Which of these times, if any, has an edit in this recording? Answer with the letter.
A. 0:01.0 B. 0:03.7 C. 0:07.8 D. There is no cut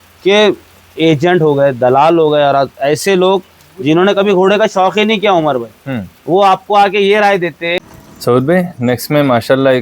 C